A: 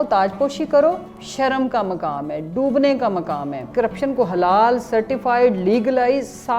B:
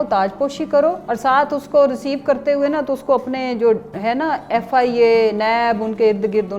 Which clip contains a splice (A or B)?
A